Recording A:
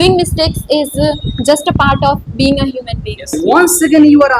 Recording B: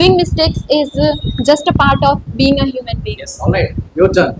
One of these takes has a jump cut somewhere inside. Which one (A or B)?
A